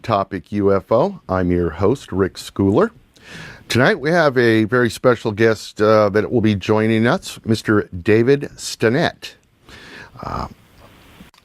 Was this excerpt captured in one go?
no; 1 cut; at 8.3 s

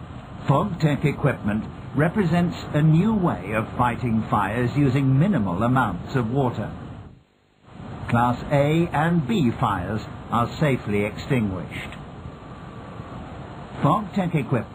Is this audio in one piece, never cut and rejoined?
yes; 0 cuts

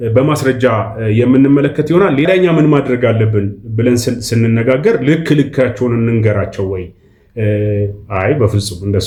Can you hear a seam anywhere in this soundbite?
no; 0 cuts

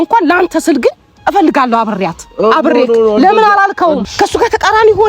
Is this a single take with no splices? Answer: no; 1 cut; at 4.0 s

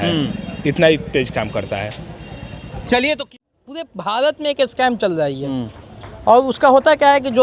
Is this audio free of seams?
no; 1 cut; at 3.3 s

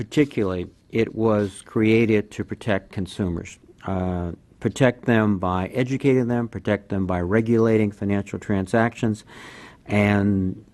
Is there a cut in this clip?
yes; 1 cut; at 7.8 s

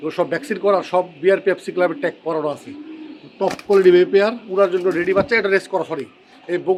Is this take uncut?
yes; 0 cuts

